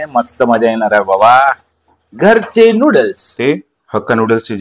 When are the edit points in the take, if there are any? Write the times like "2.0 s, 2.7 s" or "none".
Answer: 3.4 s